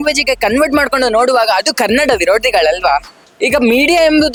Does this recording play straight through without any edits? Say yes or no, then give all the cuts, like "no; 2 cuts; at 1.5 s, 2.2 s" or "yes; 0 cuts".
yes; 0 cuts